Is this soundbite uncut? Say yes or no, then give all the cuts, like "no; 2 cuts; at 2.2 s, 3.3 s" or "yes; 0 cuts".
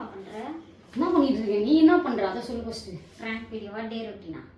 yes; 0 cuts